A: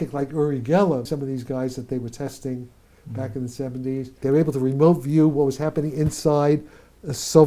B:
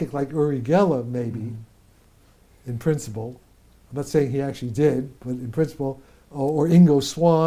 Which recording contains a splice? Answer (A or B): A